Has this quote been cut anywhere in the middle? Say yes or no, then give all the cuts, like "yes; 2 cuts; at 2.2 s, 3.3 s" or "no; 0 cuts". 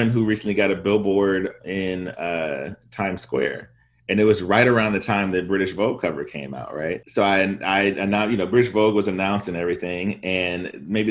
no; 0 cuts